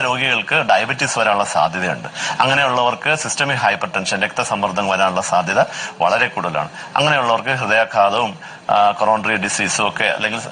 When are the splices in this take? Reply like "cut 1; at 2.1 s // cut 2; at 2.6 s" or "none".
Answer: none